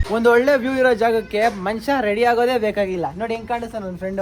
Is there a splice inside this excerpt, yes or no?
no